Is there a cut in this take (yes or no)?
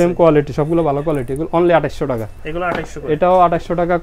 no